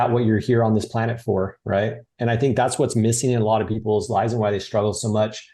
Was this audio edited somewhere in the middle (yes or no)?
no